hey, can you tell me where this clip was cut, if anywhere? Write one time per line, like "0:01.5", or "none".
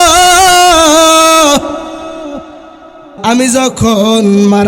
0:03.1